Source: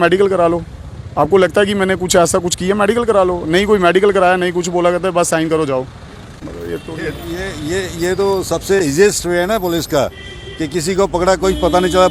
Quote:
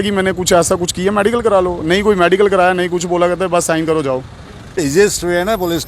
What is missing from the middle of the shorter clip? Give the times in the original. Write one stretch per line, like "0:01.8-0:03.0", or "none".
0:06.4-0:08.8